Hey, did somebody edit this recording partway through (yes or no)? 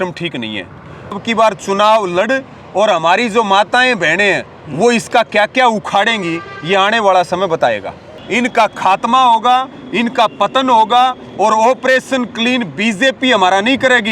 yes